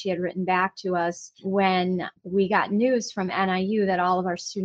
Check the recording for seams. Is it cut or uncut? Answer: cut